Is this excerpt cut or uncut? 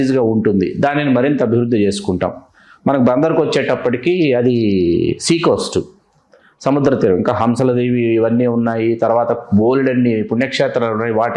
uncut